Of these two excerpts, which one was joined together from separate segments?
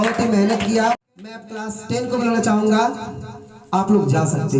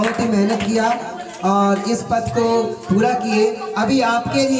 first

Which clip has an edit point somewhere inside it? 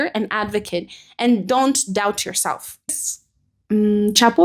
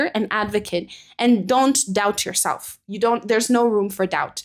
first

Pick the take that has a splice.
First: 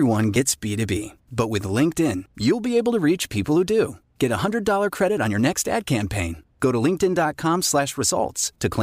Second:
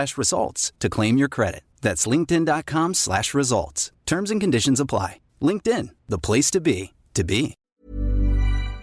second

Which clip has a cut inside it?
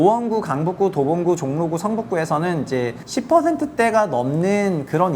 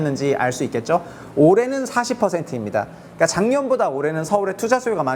first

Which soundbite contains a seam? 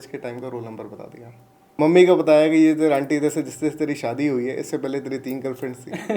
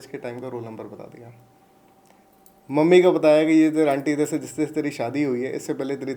first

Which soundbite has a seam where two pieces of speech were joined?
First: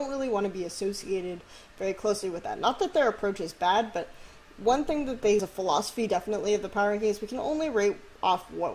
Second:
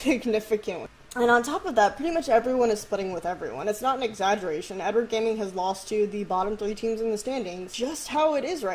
second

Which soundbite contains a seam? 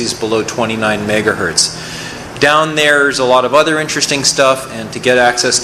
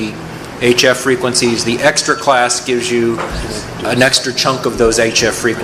first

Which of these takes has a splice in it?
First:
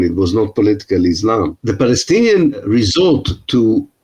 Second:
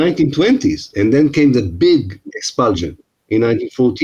first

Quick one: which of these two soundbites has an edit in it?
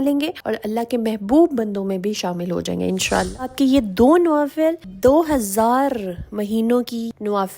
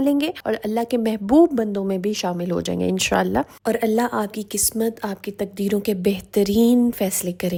first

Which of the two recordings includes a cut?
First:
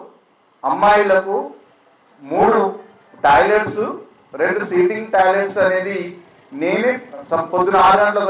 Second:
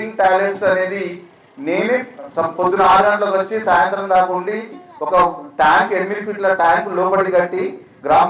second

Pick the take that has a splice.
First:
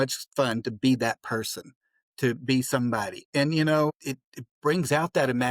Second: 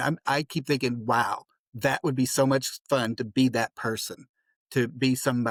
first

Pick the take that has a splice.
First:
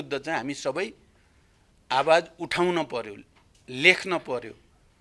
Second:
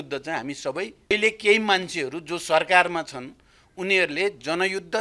second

